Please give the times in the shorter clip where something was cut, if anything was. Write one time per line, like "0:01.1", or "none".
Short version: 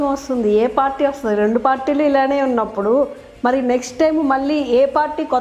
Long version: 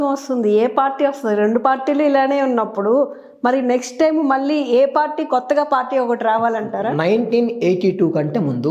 none

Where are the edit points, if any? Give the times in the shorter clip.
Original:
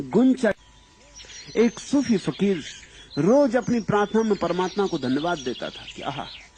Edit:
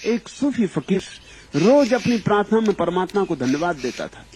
0:01.0

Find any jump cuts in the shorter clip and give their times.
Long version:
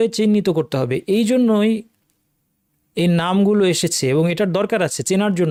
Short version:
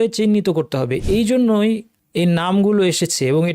0:02.0

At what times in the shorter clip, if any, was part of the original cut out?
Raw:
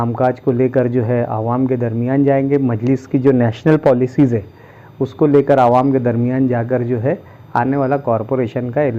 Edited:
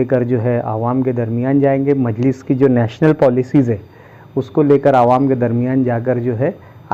none

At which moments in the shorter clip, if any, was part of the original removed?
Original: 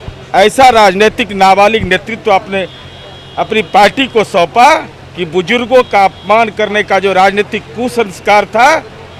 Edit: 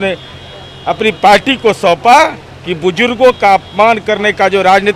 none

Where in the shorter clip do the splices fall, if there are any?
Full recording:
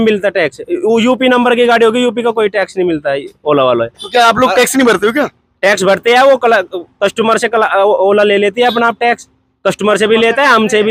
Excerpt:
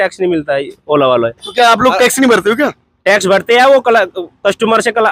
none

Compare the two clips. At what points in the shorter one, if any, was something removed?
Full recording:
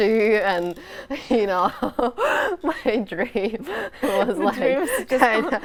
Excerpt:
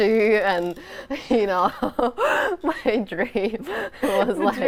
none

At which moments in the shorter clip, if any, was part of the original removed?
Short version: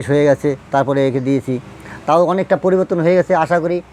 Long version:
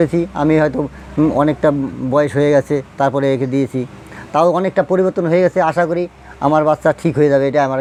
none

